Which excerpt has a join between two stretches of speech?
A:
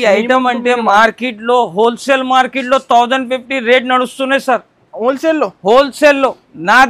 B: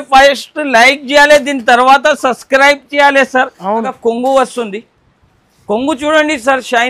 B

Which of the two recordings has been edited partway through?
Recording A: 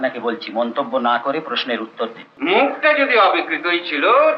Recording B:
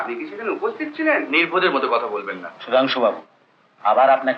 A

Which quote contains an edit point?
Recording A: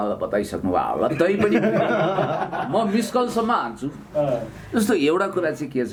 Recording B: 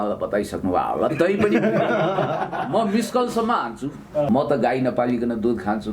B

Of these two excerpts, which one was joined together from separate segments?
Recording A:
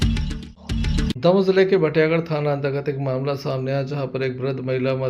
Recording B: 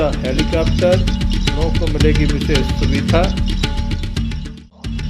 A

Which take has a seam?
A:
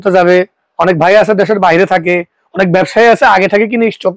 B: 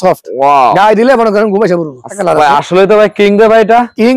B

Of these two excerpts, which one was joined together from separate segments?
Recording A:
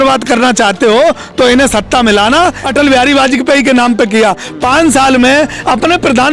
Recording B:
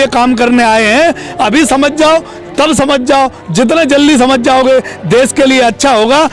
A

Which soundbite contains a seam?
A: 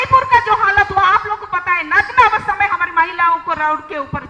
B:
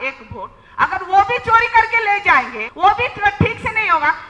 B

